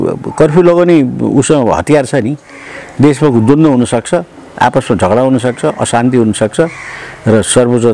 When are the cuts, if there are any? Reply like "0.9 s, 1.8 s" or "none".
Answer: none